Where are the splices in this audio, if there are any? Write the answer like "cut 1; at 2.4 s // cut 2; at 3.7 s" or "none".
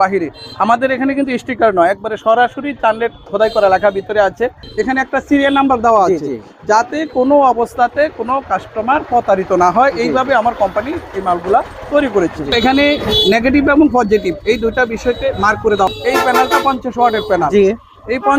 cut 1; at 4.7 s // cut 2; at 12.5 s // cut 3; at 15.9 s